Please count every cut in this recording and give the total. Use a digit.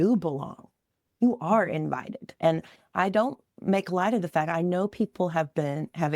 0